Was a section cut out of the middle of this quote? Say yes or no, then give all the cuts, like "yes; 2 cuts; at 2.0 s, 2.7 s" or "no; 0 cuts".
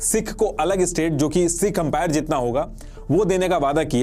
no; 0 cuts